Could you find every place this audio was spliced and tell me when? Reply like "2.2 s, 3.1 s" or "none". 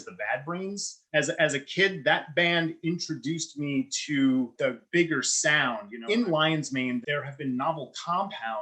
1.0 s, 4.5 s, 5.9 s, 7.0 s